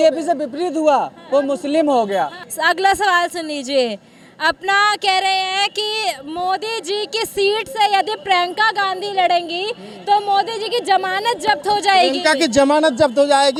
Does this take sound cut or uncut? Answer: uncut